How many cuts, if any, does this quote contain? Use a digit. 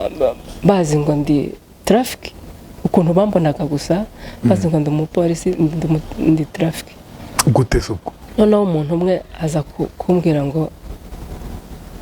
1